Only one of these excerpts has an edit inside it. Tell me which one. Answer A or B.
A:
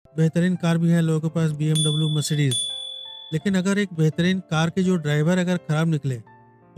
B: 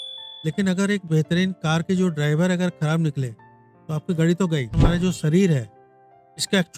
B